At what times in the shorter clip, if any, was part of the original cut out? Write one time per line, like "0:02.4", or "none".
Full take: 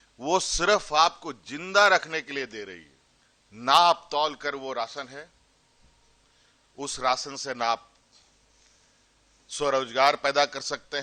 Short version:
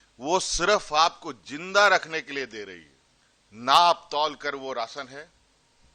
none

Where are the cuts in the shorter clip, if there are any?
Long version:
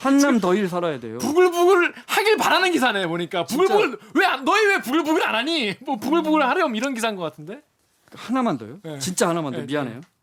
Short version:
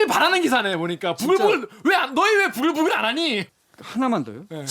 0:03.5

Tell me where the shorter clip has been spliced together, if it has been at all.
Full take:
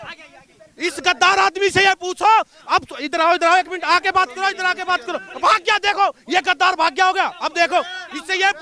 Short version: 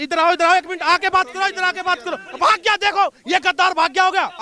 none

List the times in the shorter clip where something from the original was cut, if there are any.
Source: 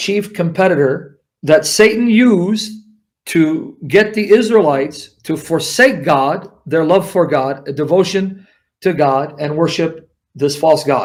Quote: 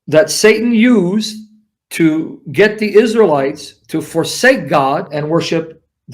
0:05.1

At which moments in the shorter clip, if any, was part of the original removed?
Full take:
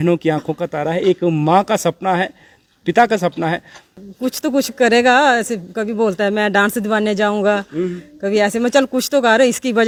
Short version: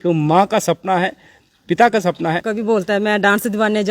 0:02.9

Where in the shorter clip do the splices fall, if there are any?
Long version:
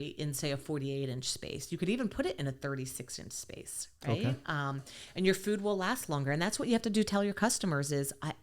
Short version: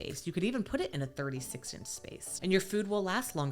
0:02.2

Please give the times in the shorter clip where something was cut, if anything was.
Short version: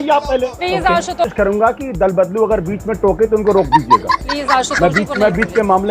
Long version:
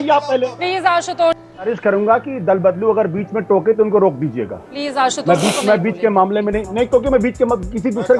0:01.2

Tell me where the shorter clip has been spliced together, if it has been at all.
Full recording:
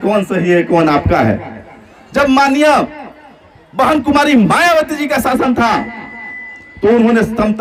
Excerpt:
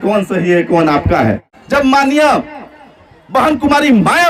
0:01.5

